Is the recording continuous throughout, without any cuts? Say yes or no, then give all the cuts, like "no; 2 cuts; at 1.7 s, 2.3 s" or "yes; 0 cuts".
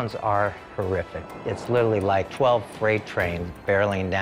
yes; 0 cuts